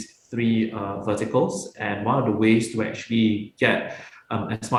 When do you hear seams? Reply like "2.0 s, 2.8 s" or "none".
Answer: none